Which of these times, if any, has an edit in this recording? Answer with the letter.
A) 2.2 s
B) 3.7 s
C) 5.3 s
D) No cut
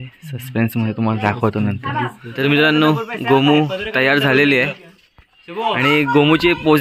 A